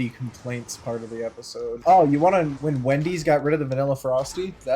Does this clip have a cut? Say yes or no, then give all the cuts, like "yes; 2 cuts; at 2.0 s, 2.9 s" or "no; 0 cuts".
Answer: yes; 2 cuts; at 1.8 s, 2.6 s